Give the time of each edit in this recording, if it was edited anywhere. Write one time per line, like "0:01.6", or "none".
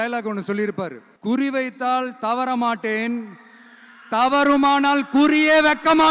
0:01.1